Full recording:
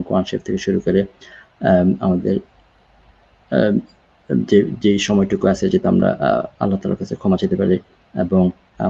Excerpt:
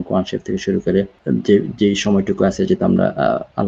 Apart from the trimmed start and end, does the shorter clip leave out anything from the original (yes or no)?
yes